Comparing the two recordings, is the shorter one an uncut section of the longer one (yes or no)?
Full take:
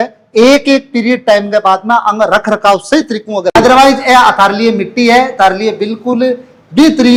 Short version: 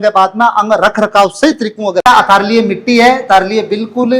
no